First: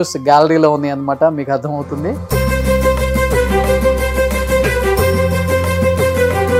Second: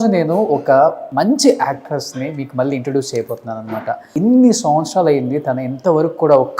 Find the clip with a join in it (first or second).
second